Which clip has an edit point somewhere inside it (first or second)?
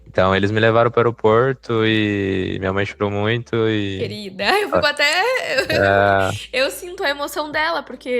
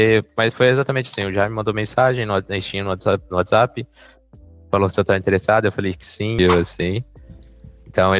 second